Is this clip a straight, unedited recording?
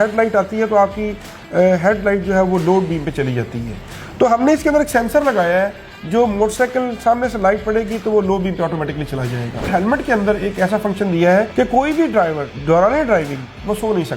no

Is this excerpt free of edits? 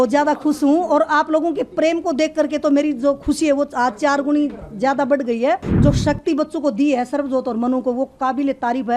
no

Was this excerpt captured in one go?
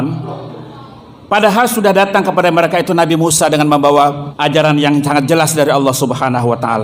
no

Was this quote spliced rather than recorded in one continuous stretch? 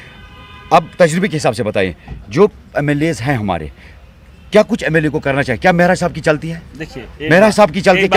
no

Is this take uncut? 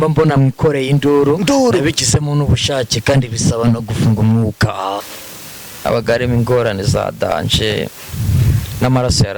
no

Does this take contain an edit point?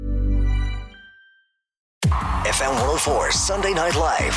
yes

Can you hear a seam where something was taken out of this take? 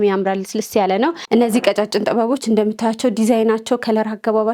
yes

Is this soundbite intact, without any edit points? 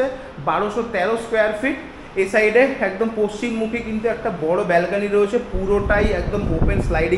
yes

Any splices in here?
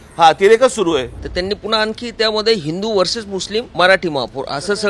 yes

